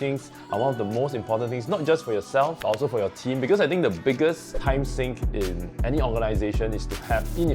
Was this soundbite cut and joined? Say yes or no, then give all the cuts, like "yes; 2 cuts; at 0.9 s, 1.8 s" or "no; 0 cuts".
yes; 1 cut; at 2.6 s